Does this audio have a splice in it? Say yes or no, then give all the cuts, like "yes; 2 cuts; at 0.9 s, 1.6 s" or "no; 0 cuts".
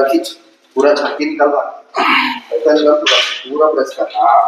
no; 0 cuts